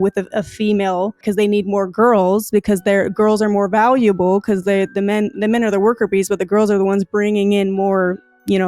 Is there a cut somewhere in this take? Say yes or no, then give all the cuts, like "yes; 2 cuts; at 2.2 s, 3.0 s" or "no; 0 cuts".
yes; 1 cut; at 1.2 s